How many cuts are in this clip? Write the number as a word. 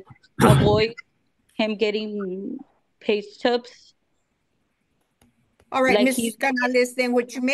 zero